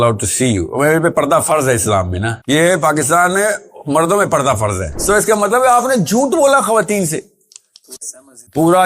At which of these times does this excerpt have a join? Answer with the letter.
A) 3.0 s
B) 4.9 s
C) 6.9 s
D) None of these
B